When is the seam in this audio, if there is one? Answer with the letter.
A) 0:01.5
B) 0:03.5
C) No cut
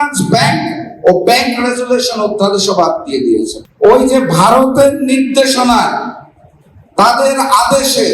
B